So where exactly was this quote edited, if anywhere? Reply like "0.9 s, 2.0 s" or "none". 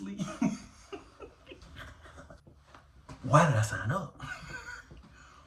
2.4 s